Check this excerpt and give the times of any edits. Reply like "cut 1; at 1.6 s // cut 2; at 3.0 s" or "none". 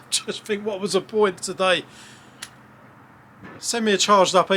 cut 1; at 3.6 s